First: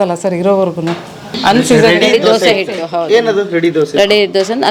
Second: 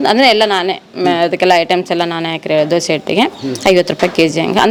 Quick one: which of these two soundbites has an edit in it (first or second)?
first